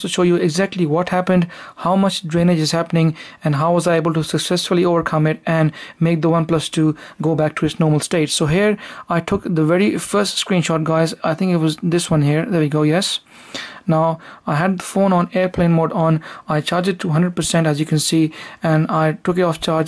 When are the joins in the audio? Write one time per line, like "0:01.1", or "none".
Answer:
0:11.5